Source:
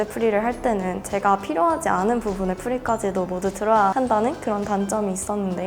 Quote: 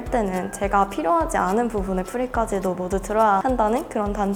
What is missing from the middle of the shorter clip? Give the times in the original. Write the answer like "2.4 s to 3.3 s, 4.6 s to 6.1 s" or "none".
none